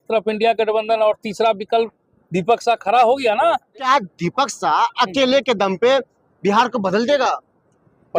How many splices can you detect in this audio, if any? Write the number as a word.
one